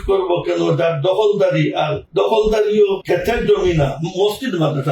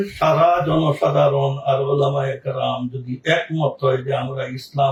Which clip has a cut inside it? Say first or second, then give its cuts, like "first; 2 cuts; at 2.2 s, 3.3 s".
first; 2 cuts; at 2.0 s, 3.0 s